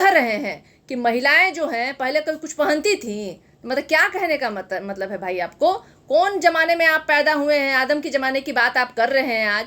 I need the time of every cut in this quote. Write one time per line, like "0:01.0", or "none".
none